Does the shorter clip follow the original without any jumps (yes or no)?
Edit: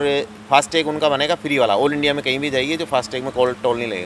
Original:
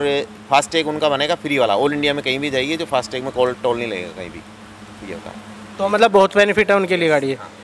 yes